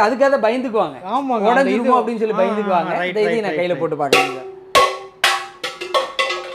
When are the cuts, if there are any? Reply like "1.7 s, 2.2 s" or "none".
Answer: none